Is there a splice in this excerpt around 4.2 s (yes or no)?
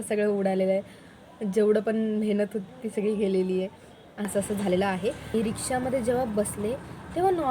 yes